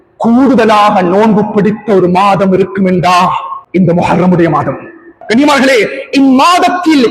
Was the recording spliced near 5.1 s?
yes; 2 cuts; at 3.5 s, 5.1 s

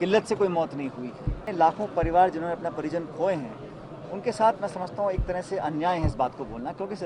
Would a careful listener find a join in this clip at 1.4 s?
yes; 1 cut; at 1.4 s

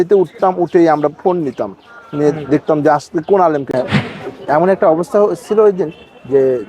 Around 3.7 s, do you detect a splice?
yes; 1 cut; at 3.7 s

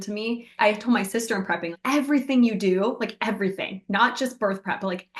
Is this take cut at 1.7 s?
yes; 1 cut; at 1.7 s

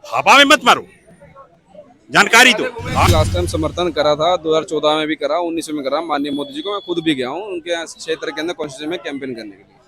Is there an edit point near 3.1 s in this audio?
yes; 1 cut; at 3.1 s

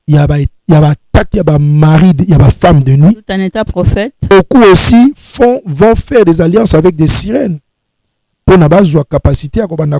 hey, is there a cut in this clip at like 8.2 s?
no; 1 cut; at 4.3 s

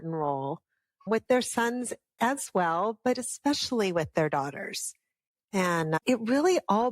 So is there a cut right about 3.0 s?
no; 2 cuts; at 1.1 s, 6.0 s

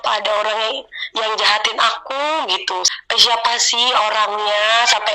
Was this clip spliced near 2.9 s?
yes; 1 cut; at 2.9 s

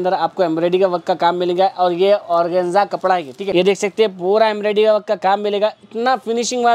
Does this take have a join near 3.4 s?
yes; 1 cut; at 3.4 s

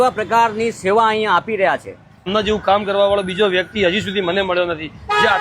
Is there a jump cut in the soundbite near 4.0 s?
no; 1 cut; at 2.3 s

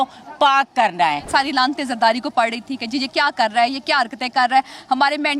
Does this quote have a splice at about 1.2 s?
no; 0 cuts

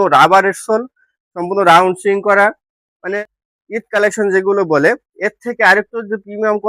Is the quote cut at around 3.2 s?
yes; 1 cut; at 3.2 s

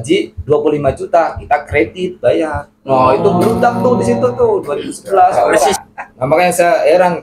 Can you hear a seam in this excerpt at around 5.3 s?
yes; 1 cut; at 5.3 s

